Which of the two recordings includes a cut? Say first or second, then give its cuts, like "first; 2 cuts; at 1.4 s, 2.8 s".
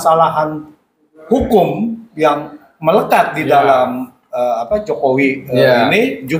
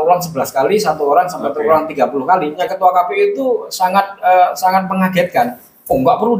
second; 1 cut; at 2.5 s